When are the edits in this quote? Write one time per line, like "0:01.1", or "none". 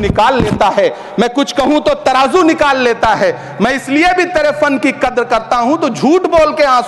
none